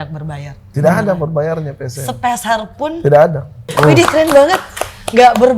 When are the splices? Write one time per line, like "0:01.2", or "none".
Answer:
0:03.6